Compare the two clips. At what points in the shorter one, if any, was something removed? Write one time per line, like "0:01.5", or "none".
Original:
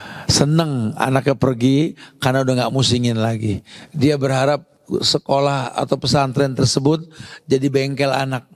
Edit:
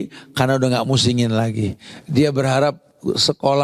none